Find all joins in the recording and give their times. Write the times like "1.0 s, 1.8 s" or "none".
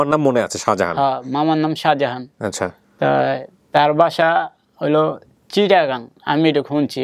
none